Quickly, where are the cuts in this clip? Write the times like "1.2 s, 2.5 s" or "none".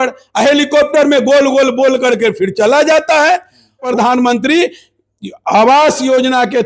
3.8 s